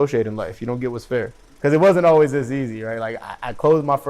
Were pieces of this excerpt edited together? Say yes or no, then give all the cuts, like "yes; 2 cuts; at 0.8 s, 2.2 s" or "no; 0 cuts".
yes; 1 cut; at 1.4 s